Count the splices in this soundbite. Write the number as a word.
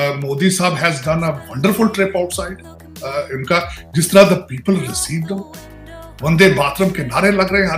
zero